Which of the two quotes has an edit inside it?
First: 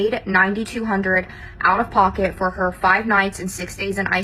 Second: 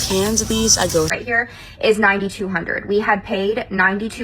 second; 1 cut; at 1.1 s

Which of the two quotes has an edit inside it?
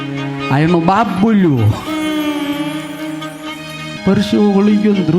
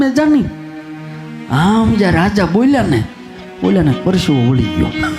first; 1 cut; at 3.8 s

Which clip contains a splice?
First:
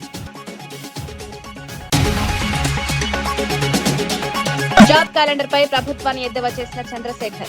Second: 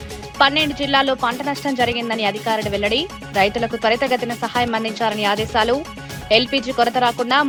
first; 2 cuts; at 1.9 s, 4.8 s

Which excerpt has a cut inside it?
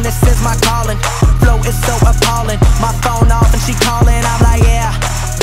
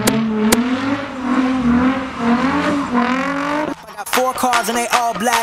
second; 1 cut; at 3.9 s

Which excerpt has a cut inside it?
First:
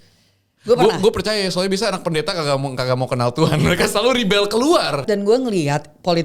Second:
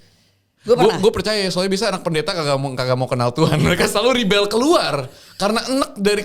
first; 1 cut; at 5.0 s

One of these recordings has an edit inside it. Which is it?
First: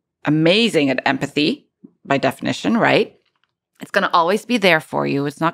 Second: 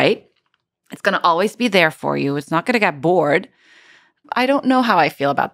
second; 1 cut; at 4.2 s

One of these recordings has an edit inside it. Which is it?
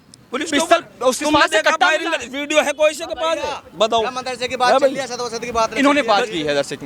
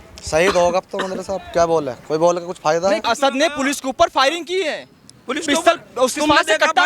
second; 1 cut; at 3.0 s

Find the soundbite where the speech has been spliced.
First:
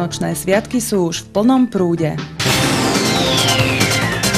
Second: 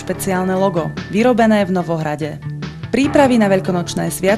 first; 1 cut; at 2.3 s

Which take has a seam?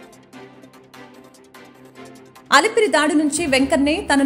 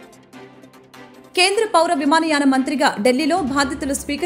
first; 1 cut; at 1.3 s

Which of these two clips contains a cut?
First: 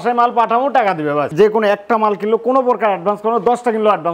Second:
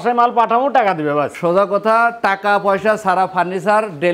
first; 1 cut; at 1.3 s

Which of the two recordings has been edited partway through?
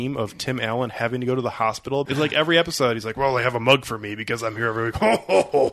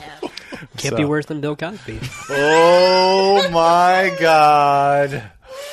first; 1 cut; at 2.1 s

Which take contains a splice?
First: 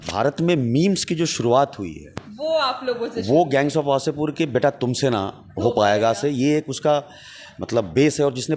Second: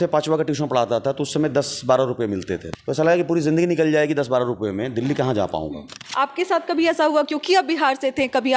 second; 2 cuts; at 2.7 s, 6.0 s

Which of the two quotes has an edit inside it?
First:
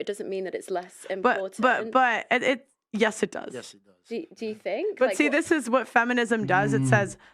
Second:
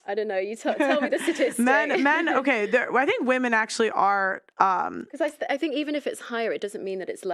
first; 1 cut; at 2.7 s

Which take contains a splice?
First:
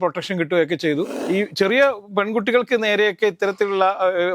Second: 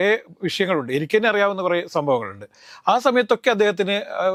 first; 1 cut; at 1.1 s

